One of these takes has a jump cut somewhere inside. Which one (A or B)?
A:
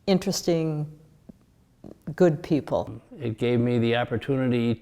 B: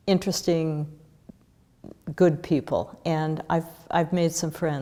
A